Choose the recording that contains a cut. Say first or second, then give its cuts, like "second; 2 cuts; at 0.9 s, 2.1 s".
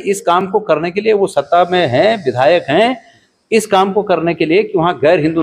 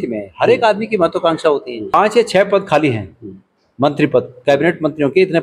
second; 1 cut; at 1.9 s